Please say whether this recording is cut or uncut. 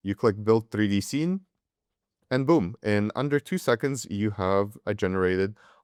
uncut